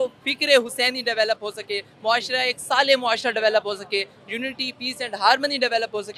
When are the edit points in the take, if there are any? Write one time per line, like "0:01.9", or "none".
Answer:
none

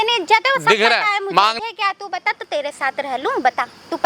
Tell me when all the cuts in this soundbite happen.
0:01.6

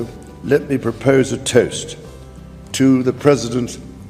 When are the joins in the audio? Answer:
none

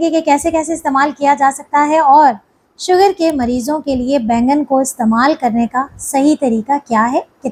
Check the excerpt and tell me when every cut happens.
none

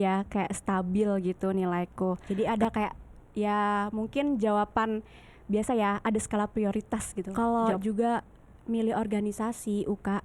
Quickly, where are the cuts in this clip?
0:02.2
0:07.3

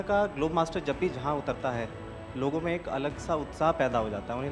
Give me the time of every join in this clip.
none

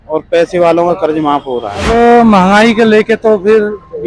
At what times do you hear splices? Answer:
0:01.9

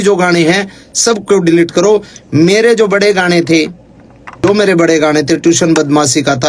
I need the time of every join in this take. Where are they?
0:04.4

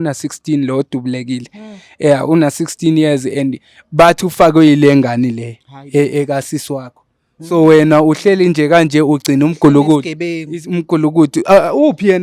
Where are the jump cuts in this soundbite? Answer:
none

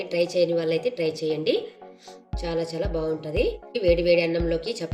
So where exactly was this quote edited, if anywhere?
0:03.7

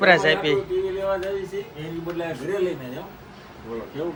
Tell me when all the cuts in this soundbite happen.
none

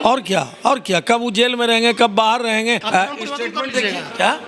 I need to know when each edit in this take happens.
0:02.8

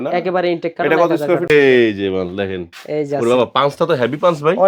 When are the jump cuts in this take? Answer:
0:01.5

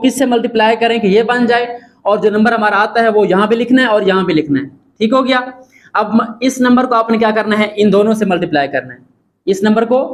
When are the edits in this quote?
none

